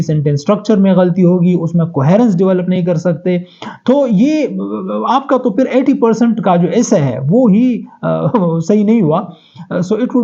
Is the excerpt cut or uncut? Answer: uncut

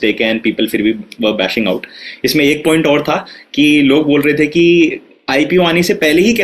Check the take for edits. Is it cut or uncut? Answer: uncut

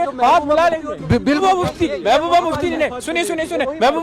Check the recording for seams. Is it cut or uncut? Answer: cut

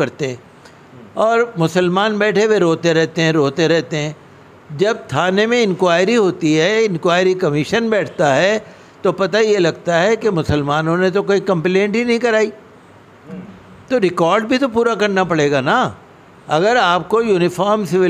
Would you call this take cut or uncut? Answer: uncut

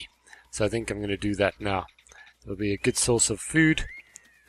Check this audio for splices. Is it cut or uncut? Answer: cut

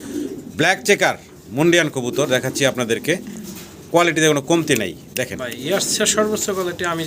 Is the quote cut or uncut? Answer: uncut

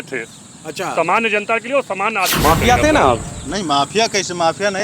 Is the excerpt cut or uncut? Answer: cut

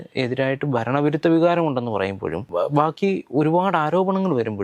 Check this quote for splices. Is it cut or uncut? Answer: cut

